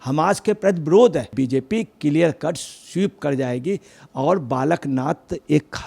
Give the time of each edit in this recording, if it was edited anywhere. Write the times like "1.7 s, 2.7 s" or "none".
1.3 s